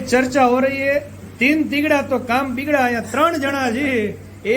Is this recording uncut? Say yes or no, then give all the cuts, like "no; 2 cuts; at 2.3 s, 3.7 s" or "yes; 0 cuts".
yes; 0 cuts